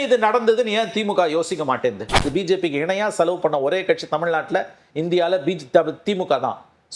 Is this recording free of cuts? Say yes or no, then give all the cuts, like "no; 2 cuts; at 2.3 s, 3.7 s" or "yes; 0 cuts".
no; 1 cut; at 2.3 s